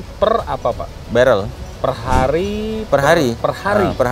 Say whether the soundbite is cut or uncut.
cut